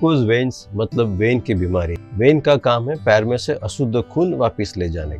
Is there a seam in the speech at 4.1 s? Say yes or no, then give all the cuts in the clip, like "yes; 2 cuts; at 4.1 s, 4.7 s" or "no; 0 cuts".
no; 1 cut; at 2.0 s